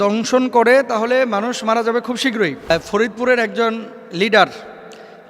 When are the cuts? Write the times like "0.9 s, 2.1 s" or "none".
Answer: 2.7 s